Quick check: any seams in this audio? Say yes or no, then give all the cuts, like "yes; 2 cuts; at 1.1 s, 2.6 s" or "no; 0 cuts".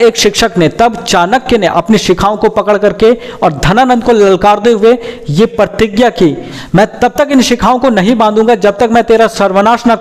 no; 0 cuts